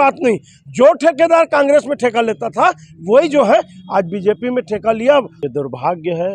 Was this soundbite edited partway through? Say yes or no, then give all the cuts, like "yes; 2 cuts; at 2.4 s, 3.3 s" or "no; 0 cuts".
yes; 1 cut; at 5.4 s